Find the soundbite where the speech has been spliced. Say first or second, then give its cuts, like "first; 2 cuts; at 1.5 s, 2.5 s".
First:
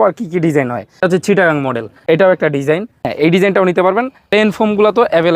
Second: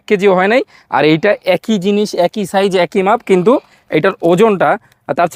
first; 4 cuts; at 1.0 s, 1.9 s, 3.1 s, 4.2 s